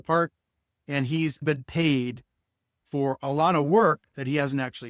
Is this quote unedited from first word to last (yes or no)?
no